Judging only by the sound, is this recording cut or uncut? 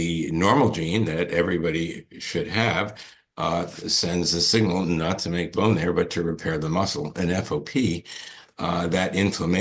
uncut